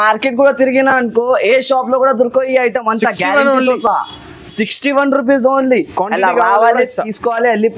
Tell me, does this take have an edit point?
no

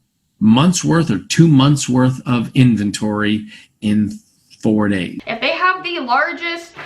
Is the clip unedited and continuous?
no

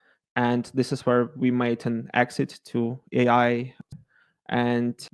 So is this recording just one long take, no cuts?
no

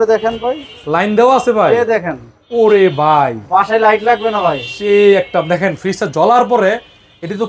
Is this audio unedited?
yes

